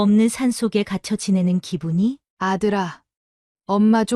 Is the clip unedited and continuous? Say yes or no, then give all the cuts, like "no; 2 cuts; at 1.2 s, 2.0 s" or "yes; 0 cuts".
no; 1 cut; at 2.3 s